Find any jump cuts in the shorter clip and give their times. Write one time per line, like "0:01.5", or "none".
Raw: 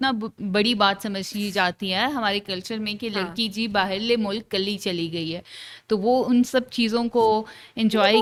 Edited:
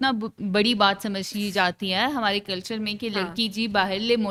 none